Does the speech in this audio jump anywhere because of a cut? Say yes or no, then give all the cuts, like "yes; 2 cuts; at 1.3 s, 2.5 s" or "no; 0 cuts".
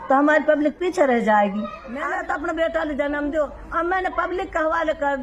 yes; 1 cut; at 1.8 s